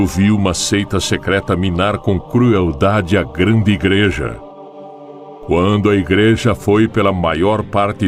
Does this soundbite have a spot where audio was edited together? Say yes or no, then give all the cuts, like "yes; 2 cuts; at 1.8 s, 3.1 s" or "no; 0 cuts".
no; 0 cuts